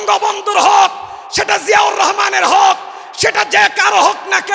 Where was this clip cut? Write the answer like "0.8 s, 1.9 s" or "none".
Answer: none